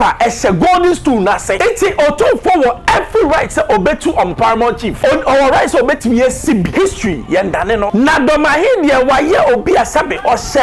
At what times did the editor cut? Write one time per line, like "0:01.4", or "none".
0:01.6
0:04.9
0:06.7
0:07.9